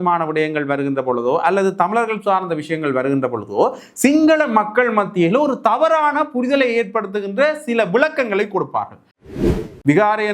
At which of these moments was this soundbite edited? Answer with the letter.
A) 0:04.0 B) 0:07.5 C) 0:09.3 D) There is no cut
C